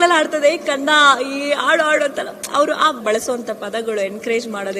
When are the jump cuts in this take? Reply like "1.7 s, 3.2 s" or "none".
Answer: 3.0 s